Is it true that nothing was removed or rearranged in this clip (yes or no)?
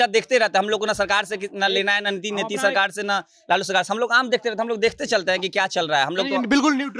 yes